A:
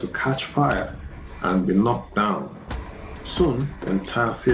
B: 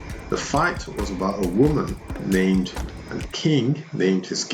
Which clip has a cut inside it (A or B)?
B